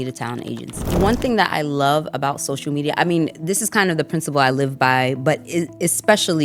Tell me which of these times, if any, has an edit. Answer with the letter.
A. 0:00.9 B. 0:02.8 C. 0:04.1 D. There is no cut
A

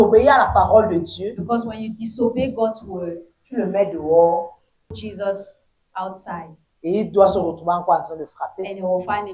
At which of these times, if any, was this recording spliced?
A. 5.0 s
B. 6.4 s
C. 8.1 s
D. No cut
A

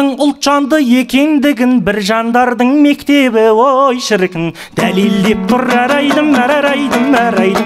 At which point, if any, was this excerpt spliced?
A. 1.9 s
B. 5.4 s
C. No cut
C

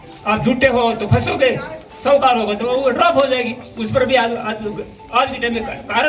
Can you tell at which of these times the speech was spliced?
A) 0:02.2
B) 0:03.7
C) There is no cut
C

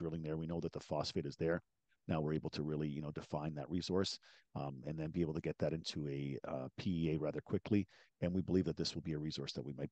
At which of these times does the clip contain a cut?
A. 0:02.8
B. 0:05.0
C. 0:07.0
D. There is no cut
D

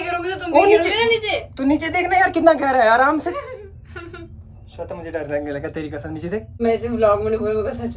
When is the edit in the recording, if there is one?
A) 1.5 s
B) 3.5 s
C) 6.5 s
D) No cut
C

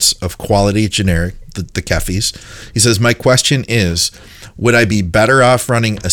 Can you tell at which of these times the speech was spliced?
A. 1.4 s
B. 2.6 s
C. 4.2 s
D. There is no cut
D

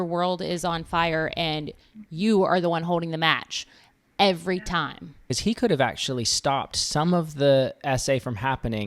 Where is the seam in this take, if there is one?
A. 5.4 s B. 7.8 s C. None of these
A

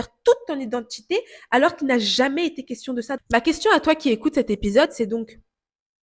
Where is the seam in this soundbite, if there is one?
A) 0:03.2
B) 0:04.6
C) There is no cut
A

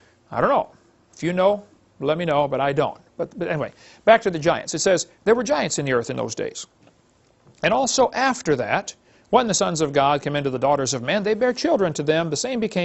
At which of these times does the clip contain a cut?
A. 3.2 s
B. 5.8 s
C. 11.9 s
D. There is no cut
A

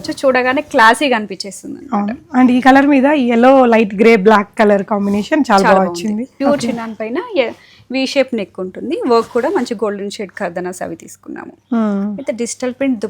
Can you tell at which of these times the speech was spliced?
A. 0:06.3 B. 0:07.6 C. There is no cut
A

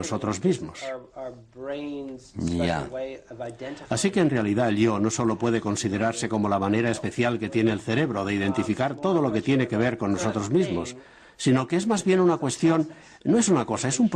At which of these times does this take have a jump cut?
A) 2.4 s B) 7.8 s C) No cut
B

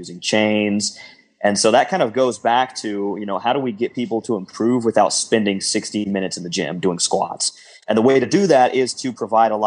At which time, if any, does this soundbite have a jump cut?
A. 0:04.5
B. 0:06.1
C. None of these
B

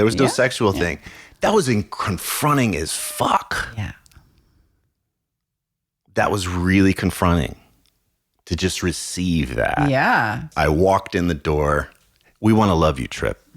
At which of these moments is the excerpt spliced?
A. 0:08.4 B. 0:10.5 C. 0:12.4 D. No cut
B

